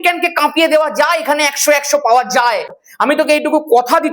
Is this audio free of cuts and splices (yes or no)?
no